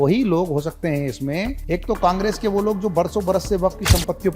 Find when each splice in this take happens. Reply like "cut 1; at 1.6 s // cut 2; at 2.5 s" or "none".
cut 1; at 1.6 s